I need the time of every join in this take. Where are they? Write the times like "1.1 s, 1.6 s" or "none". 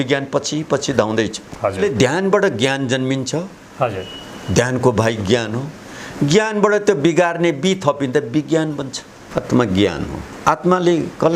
1.8 s, 9.3 s